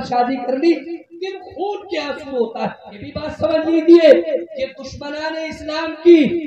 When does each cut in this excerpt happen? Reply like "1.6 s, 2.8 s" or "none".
3.2 s